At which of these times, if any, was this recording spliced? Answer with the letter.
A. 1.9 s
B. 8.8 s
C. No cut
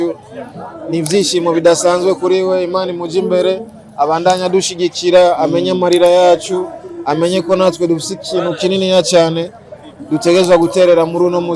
C